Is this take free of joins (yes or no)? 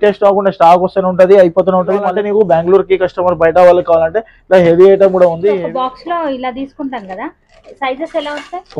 no